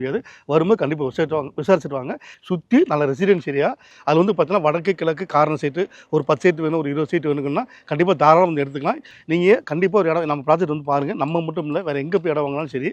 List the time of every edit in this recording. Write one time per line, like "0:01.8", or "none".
0:02.3
0:03.9
0:09.1

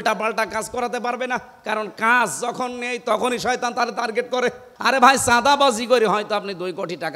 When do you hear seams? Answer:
0:04.7

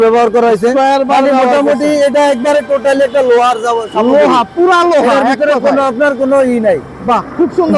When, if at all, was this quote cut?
none

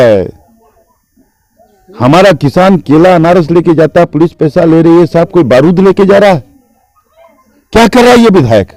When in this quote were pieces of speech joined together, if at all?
none

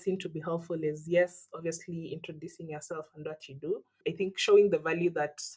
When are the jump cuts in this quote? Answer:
0:04.0

